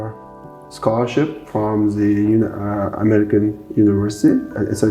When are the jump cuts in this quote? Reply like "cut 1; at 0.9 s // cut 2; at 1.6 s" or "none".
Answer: none